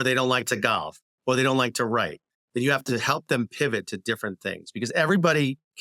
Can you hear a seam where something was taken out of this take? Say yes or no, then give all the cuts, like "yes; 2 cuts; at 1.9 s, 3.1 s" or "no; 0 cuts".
no; 0 cuts